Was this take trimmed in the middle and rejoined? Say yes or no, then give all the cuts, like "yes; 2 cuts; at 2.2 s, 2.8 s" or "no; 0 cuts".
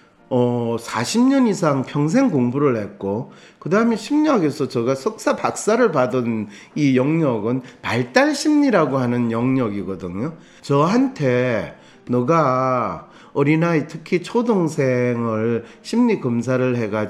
yes; 1 cut; at 10.5 s